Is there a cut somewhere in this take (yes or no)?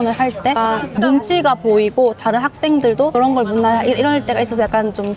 no